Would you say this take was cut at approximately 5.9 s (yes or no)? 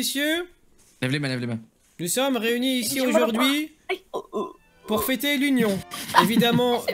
yes